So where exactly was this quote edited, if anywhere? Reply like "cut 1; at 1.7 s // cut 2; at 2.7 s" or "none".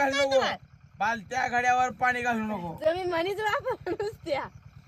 none

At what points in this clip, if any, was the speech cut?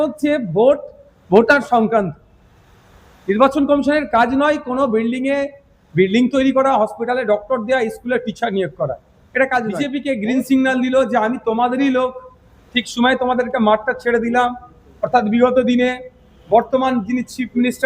cut 1; at 9.9 s

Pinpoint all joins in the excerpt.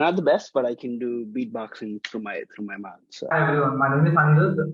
cut 1; at 3.3 s

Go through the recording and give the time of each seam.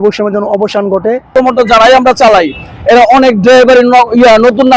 cut 1; at 1.3 s

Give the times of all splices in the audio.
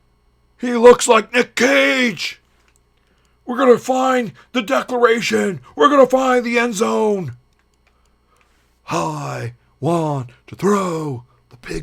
none

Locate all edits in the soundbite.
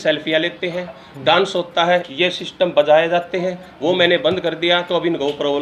none

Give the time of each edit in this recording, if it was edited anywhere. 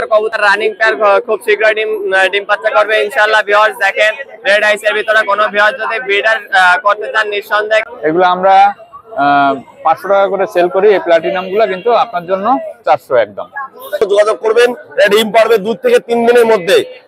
cut 1; at 7.9 s // cut 2; at 14.0 s

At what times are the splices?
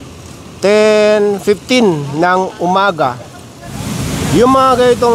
cut 1; at 3.8 s

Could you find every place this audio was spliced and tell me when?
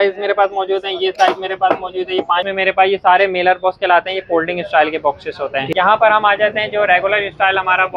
cut 1; at 2.5 s // cut 2; at 5.7 s

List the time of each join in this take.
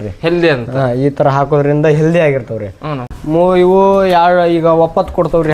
cut 1; at 3.1 s

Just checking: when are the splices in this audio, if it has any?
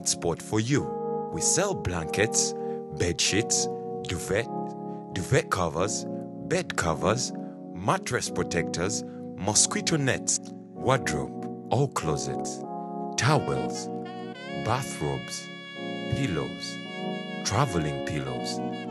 none

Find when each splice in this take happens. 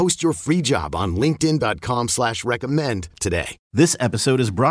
cut 1; at 3.6 s

